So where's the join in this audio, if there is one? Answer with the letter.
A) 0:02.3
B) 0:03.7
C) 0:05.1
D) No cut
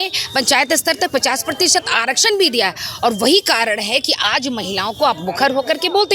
D